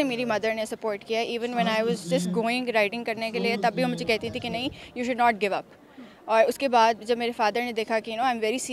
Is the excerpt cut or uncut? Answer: uncut